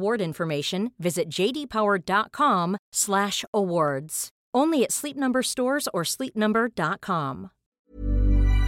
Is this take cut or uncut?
cut